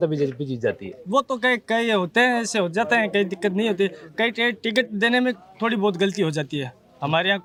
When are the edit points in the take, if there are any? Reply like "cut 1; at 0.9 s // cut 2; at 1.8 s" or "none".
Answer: none

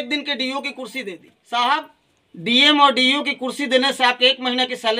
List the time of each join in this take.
cut 1; at 1.3 s

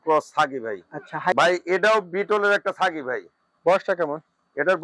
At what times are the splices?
cut 1; at 1.3 s

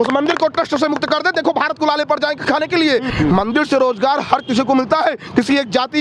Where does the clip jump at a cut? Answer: cut 1; at 3.1 s

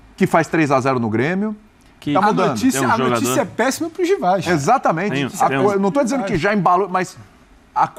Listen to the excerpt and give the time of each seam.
cut 1; at 2.0 s

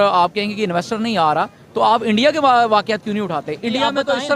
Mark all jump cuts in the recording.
none

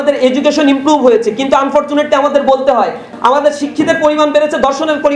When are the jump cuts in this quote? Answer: cut 1; at 3.1 s

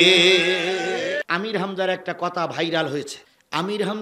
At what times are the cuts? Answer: cut 1; at 1.2 s

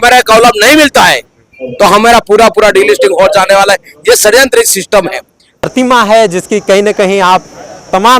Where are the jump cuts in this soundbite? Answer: cut 1; at 5.7 s

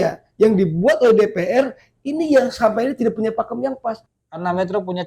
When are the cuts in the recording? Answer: cut 1; at 4.1 s

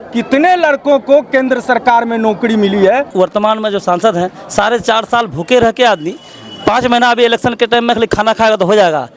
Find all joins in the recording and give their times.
cut 1; at 3.1 s

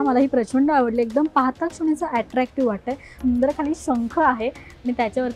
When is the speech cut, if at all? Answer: cut 1; at 3.1 s

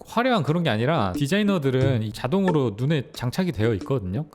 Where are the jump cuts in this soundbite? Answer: cut 1; at 1.2 s // cut 2; at 2.1 s

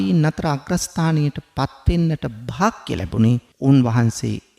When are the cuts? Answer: cut 1; at 3.5 s

